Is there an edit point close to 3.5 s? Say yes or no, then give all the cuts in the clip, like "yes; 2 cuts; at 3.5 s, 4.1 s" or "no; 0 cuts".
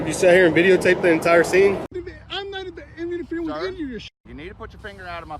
no; 1 cut; at 1.9 s